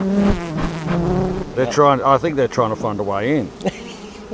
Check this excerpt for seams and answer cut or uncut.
uncut